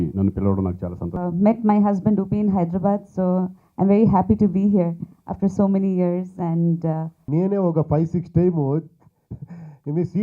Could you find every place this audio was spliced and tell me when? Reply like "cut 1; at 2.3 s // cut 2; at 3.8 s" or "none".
cut 1; at 1.1 s // cut 2; at 7.1 s